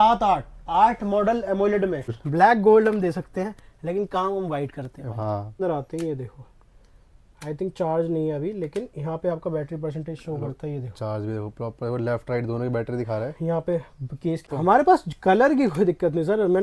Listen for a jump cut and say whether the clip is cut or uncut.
cut